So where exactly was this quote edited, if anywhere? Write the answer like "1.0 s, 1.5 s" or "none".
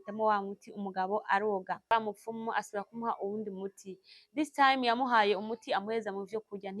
1.9 s

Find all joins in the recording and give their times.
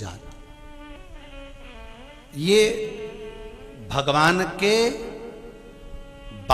1.0 s

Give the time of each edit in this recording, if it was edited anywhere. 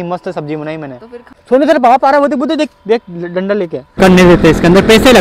1.3 s, 4.0 s

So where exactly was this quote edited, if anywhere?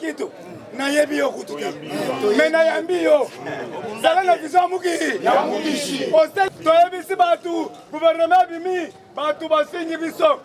6.5 s

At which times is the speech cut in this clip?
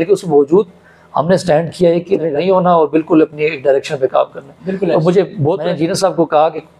2.3 s, 5.6 s

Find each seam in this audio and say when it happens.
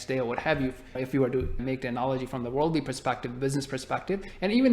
0.9 s, 1.6 s

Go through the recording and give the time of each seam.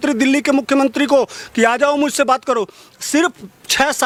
none

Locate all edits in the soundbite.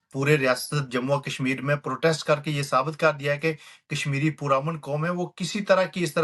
none

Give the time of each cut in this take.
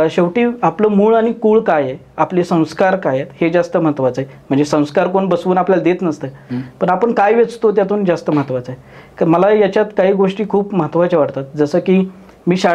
none

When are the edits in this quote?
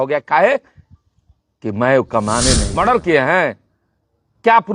2.7 s

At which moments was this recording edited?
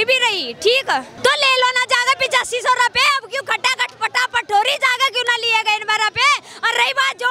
1.1 s

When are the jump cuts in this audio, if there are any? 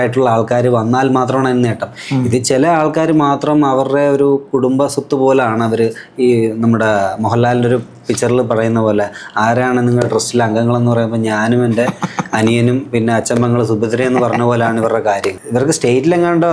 15.4 s

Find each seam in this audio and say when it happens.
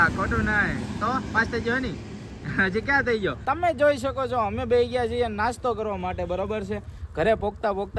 none

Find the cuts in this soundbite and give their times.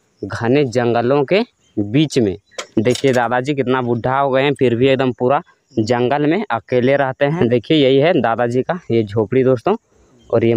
2.6 s, 7.3 s

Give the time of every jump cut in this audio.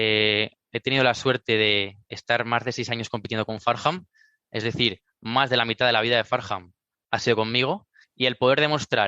8.1 s

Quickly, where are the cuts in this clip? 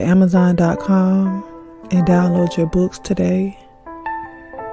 none

